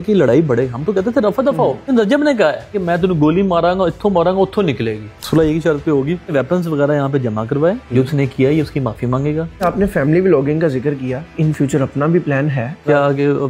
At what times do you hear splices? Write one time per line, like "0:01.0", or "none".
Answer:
0:01.9
0:05.1
0:09.5
0:11.3